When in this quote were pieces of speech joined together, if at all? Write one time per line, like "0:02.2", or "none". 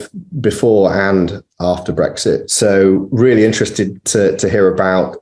0:02.5